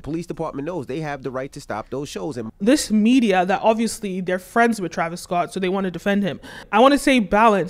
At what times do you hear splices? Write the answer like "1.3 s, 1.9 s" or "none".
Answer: 2.4 s, 6.6 s